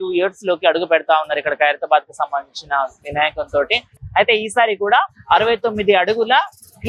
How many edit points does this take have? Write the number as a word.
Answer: zero